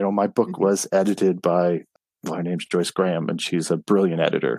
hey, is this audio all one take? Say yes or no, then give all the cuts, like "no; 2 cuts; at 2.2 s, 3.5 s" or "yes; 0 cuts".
no; 1 cut; at 1.9 s